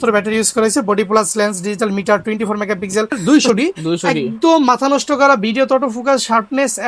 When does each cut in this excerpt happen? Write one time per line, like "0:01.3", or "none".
0:03.2